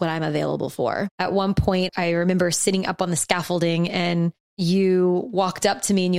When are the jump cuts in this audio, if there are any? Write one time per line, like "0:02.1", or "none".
0:01.1
0:01.9
0:04.4